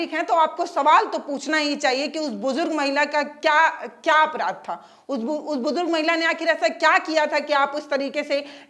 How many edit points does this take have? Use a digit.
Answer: 0